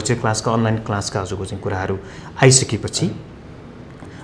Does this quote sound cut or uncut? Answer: uncut